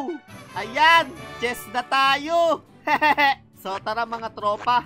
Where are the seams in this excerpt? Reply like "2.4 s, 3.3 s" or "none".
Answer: none